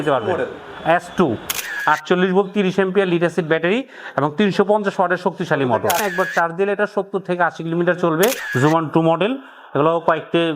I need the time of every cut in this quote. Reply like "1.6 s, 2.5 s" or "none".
1.7 s, 6.0 s, 8.5 s